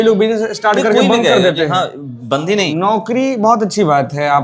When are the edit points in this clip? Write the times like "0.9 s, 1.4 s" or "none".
2.7 s

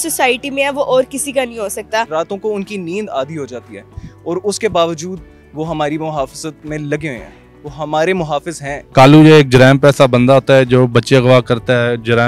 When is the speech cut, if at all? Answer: 2.1 s, 8.8 s

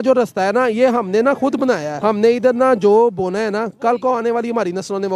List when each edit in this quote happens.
1.9 s

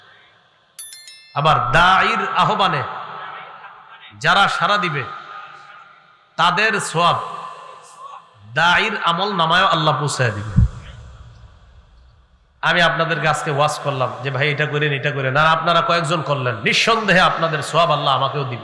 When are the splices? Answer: none

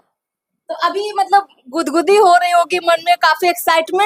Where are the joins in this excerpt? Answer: none

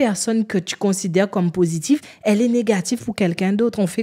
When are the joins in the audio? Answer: none

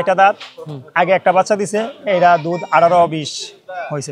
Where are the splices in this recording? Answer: none

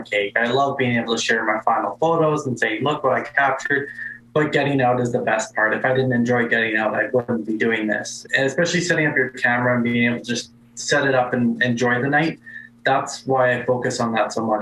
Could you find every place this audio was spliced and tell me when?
8.2 s, 11.6 s

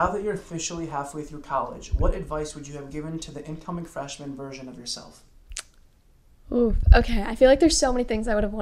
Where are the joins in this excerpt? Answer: none

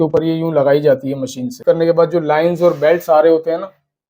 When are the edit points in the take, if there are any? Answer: 1.7 s

